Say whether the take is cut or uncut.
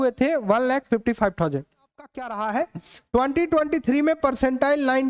cut